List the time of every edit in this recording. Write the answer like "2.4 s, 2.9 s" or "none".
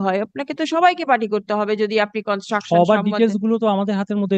none